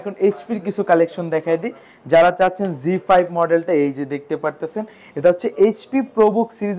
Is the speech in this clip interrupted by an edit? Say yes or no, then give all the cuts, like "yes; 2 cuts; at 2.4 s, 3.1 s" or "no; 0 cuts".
no; 0 cuts